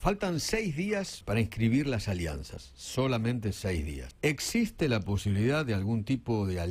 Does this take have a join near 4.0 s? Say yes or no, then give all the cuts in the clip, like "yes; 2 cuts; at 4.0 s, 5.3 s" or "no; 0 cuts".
yes; 2 cuts; at 1.2 s, 4.0 s